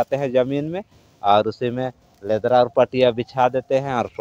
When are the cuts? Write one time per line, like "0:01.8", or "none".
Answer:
none